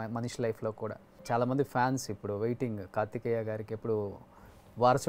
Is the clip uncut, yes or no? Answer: no